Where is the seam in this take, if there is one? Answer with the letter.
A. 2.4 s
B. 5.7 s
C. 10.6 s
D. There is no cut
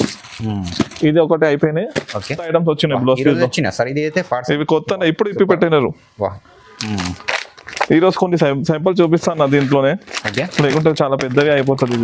A